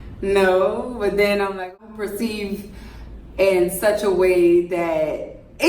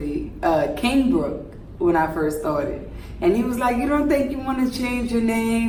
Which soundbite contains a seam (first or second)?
first